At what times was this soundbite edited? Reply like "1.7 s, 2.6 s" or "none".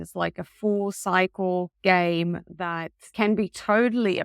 1.7 s